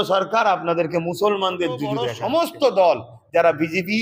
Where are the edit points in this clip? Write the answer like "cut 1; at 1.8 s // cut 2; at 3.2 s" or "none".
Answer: cut 1; at 2.0 s